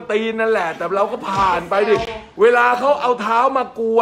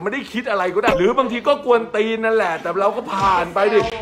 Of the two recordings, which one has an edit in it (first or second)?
second